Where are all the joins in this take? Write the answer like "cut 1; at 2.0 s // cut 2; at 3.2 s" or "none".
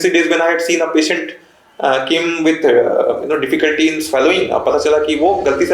none